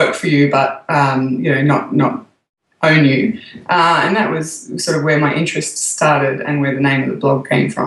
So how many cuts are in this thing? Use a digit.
1